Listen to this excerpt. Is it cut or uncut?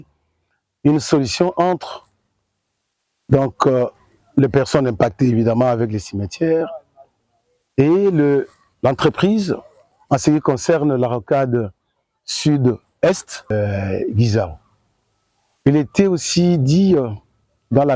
cut